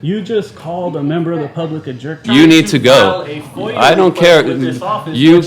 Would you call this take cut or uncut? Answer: cut